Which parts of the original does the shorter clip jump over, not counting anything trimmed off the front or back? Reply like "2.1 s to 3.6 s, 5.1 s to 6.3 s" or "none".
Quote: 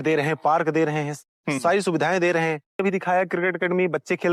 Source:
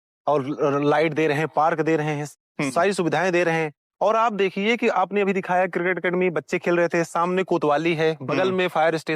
3.9 s to 5.2 s